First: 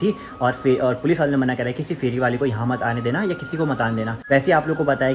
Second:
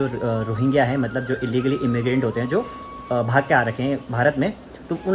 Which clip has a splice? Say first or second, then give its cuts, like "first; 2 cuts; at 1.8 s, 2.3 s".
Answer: first; 1 cut; at 4.2 s